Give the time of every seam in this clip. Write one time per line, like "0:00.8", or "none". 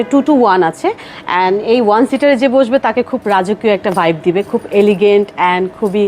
none